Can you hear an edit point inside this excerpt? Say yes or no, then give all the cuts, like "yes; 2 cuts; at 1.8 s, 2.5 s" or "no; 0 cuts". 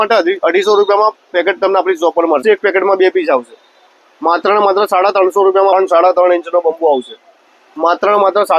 yes; 2 cuts; at 2.4 s, 5.7 s